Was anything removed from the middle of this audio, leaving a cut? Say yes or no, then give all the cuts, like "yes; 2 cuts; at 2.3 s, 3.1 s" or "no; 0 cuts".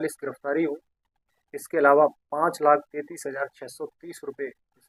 no; 0 cuts